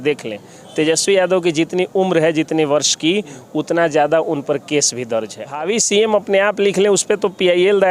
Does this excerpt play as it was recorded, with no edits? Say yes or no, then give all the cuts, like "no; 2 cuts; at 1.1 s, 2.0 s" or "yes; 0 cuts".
no; 1 cut; at 5.5 s